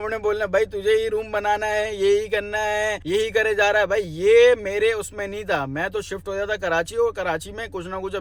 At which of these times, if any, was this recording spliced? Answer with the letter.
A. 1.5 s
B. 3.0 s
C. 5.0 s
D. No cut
D